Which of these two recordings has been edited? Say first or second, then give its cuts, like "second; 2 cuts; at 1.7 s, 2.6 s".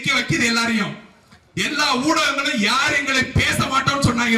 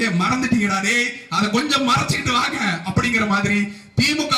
first; 1 cut; at 1.4 s